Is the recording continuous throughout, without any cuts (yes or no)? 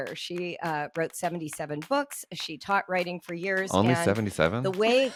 yes